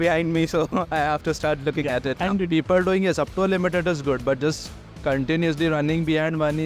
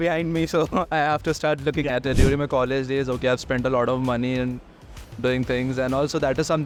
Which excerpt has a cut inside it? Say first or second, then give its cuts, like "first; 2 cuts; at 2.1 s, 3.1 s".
first; 1 cut; at 2.1 s